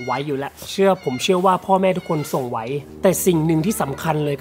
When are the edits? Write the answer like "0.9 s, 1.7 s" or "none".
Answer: 2.9 s